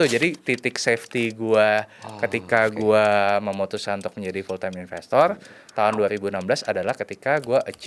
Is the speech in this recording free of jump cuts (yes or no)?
yes